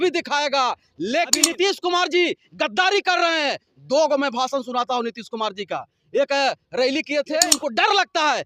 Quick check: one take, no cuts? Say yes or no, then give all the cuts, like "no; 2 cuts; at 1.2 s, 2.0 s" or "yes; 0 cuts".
no; 2 cuts; at 1.3 s, 7.5 s